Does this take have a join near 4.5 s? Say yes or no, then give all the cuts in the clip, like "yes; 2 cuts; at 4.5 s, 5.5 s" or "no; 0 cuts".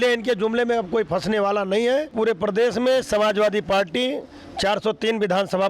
no; 1 cut; at 2.1 s